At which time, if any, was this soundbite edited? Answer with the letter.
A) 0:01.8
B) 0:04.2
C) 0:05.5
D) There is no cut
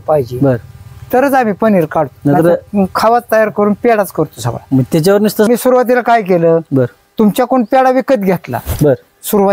C